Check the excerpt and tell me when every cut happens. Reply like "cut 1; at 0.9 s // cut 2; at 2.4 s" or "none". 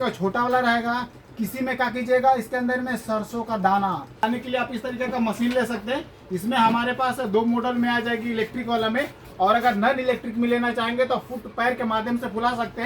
cut 1; at 4.2 s